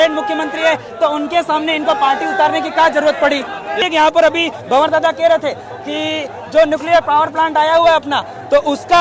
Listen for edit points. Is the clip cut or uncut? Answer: cut